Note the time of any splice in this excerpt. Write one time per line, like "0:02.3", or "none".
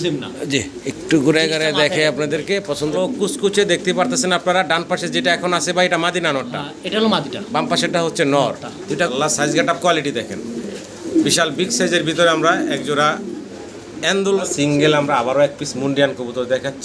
0:02.9
0:09.1
0:14.4